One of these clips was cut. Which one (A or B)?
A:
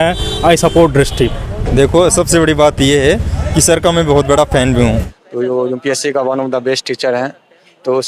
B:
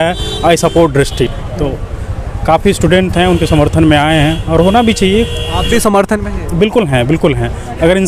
A